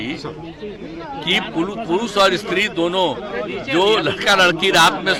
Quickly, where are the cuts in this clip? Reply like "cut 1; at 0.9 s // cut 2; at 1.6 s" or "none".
none